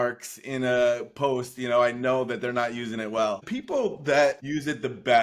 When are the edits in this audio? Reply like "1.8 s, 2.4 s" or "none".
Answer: 3.4 s, 4.4 s